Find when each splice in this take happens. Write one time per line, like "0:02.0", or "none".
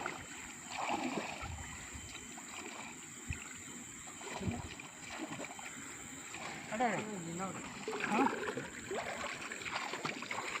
0:03.4